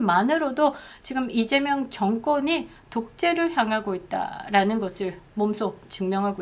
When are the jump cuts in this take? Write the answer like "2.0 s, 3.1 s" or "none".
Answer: none